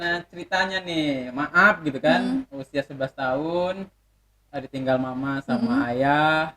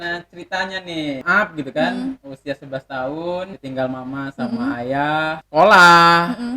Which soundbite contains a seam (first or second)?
second